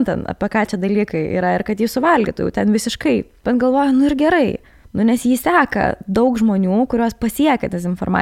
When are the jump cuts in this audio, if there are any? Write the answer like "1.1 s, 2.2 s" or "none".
3.3 s